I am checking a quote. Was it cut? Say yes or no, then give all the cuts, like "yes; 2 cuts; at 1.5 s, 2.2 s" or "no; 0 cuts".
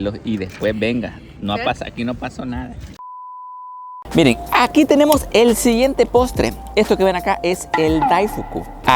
no; 0 cuts